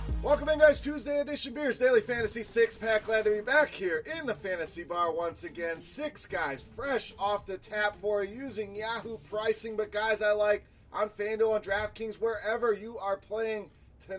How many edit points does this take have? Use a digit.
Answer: 0